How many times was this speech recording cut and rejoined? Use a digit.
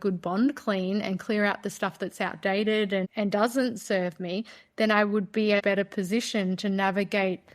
2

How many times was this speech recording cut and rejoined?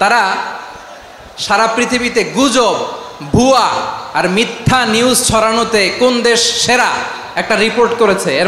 0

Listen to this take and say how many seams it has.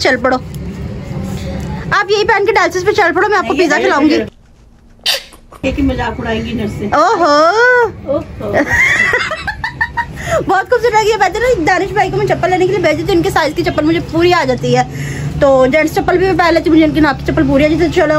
0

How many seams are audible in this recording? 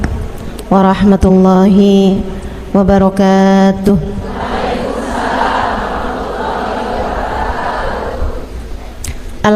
0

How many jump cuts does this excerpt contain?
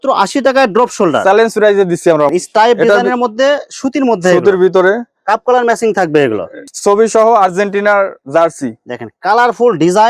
2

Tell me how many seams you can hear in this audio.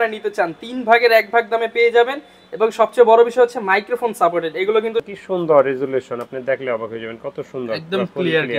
1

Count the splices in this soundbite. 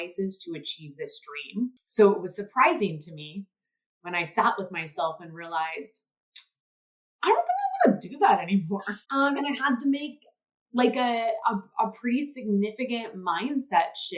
2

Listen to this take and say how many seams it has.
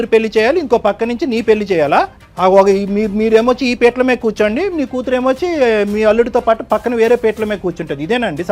1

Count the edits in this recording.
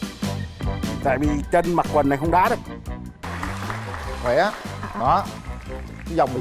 1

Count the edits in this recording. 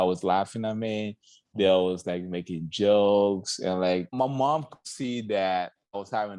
1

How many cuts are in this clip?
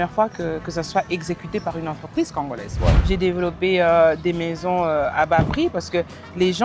1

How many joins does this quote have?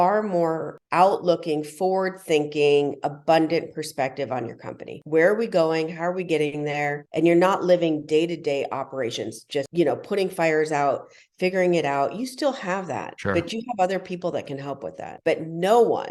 0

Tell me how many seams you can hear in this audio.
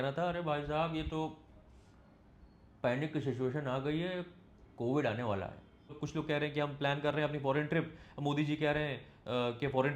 1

